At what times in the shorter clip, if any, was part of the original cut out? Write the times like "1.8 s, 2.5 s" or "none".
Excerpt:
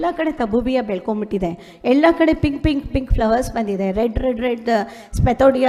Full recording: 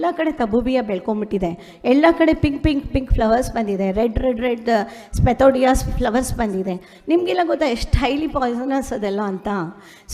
none